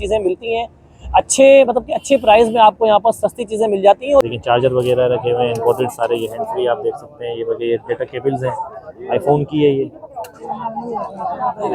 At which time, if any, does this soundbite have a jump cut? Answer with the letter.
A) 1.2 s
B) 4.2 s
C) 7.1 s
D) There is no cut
B